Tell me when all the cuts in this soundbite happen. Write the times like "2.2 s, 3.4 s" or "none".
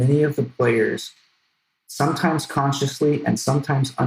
none